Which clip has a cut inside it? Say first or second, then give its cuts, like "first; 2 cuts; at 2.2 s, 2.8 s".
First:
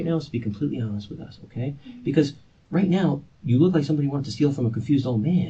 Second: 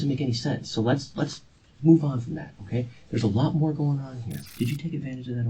second; 1 cut; at 4.4 s